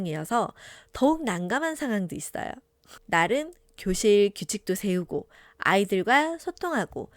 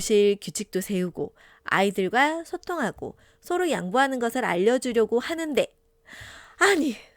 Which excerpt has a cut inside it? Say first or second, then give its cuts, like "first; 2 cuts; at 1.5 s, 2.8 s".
first; 1 cut; at 2.9 s